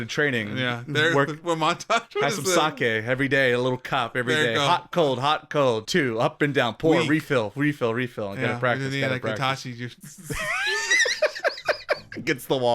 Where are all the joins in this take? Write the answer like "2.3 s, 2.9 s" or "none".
5.8 s, 10.0 s